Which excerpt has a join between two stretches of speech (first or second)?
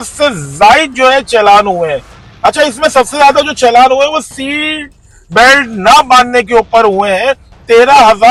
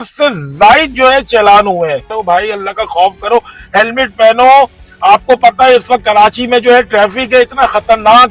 second